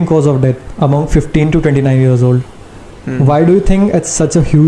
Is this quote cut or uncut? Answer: uncut